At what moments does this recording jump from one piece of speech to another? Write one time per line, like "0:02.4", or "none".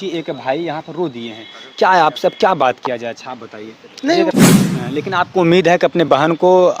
0:04.2
0:04.9